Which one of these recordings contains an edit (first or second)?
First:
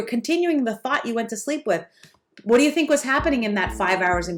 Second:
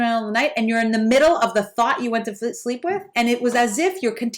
second